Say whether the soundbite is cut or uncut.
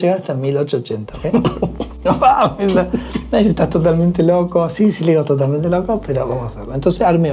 uncut